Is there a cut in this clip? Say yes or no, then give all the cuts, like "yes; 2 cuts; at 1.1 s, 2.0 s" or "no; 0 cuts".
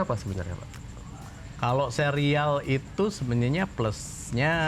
no; 0 cuts